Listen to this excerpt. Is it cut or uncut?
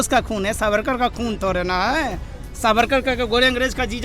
uncut